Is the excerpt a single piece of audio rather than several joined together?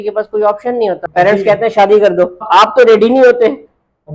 no; 2 cuts; at 1.0 s, 2.5 s

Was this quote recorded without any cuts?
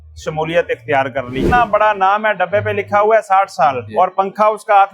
no; 2 cuts; at 1.4 s, 3.9 s

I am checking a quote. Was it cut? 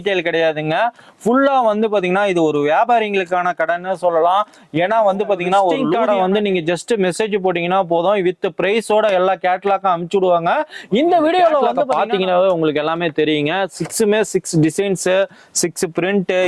yes; 2 cuts; at 6.0 s, 11.8 s

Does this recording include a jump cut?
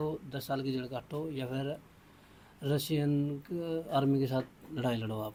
no; 0 cuts

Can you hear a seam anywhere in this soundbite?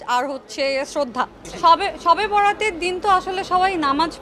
no; 0 cuts

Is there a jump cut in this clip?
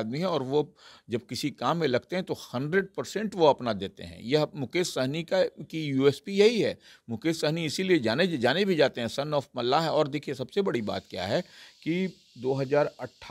no; 0 cuts

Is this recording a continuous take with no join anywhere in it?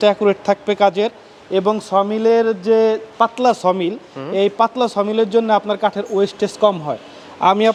yes; 0 cuts

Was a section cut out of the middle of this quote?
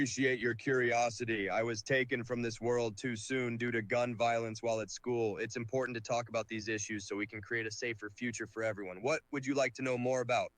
yes; 1 cut; at 2.4 s

